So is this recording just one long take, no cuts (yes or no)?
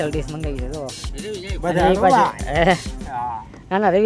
yes